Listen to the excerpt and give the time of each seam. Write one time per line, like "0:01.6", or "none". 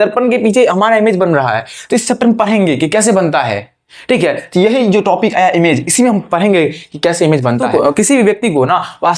0:07.6